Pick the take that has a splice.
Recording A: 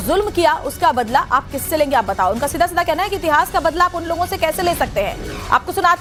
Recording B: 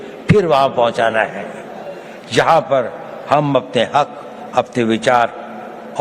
B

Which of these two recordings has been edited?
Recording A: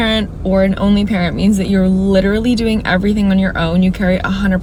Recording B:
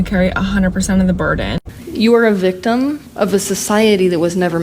B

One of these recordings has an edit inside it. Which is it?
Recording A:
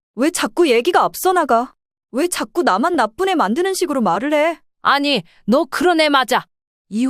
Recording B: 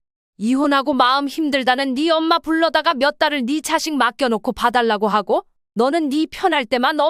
A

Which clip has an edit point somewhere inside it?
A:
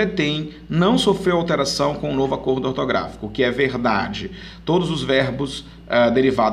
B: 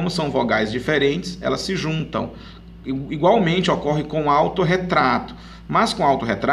B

